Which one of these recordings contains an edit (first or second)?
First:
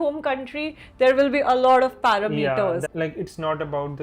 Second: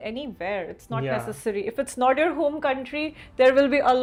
first